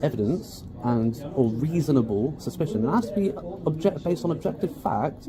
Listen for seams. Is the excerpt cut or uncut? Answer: uncut